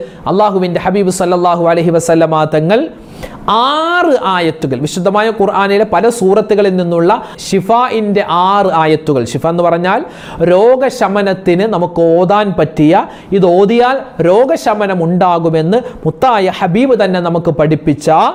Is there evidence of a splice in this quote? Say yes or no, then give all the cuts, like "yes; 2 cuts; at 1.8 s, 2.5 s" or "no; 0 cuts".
no; 0 cuts